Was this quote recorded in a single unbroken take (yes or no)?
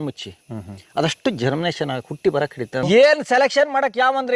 no